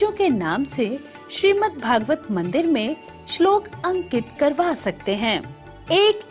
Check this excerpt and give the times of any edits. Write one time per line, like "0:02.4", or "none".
none